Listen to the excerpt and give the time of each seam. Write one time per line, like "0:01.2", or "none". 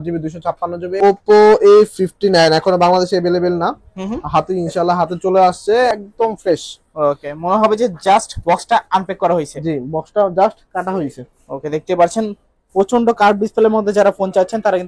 0:00.9
0:05.9